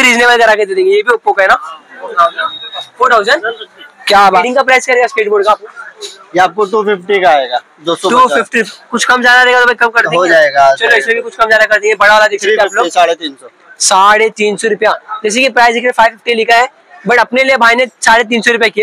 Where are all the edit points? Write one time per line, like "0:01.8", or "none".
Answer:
0:04.4